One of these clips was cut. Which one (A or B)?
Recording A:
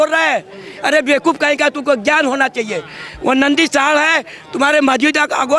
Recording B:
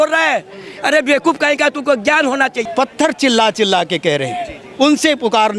B